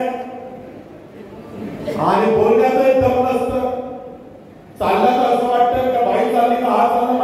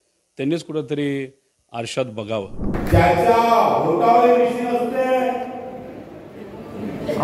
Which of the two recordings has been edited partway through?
second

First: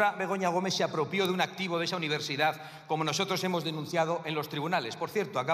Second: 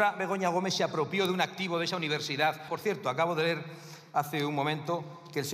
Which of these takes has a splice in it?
second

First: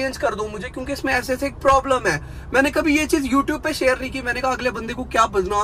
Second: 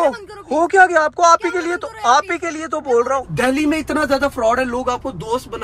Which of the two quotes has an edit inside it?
second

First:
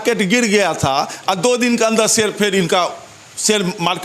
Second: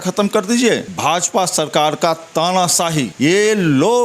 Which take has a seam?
second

